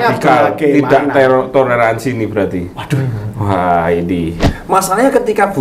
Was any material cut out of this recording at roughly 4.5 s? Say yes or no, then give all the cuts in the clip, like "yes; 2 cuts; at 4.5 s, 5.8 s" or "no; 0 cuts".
yes; 1 cut; at 4.5 s